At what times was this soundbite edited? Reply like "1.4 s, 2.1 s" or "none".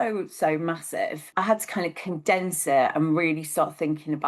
1.3 s